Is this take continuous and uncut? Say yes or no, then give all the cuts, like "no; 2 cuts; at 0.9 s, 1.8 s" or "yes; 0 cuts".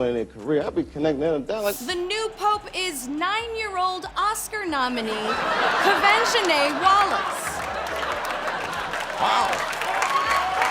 no; 1 cut; at 1.8 s